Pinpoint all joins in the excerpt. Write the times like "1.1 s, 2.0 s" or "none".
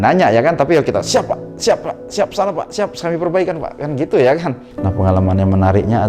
4.6 s